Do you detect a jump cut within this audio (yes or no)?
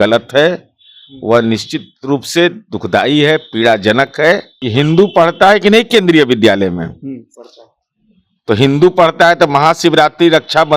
yes